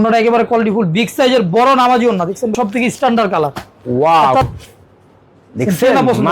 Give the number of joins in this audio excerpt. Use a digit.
2